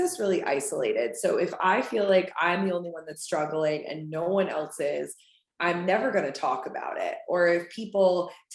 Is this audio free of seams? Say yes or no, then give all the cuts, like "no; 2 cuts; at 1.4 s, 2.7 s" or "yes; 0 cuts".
yes; 0 cuts